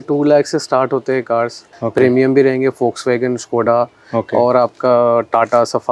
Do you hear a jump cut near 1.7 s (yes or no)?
yes